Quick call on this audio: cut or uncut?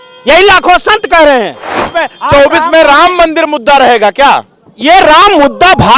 cut